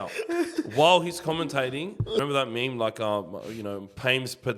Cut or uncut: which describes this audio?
cut